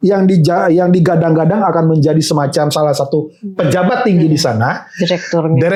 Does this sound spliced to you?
no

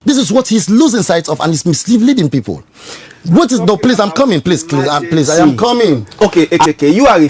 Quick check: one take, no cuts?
no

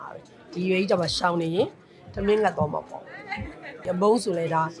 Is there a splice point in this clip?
yes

